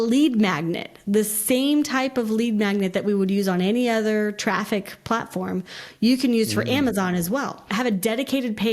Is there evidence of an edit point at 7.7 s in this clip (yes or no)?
yes